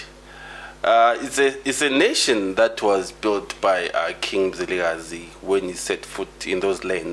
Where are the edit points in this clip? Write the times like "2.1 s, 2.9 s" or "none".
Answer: none